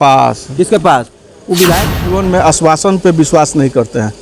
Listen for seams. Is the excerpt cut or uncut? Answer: cut